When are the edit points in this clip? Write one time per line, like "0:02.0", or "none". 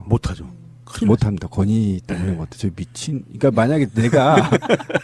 0:01.0